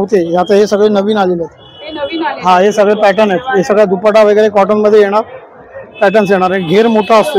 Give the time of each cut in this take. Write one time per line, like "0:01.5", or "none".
none